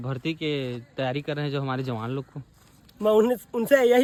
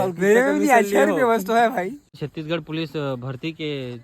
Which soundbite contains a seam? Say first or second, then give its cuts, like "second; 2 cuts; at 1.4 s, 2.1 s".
second; 1 cut; at 2.1 s